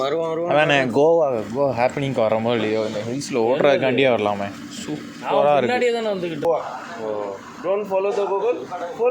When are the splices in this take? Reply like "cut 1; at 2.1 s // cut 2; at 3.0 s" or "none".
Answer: cut 1; at 6.4 s